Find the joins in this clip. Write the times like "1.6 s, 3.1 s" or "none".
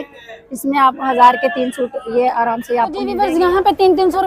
3.1 s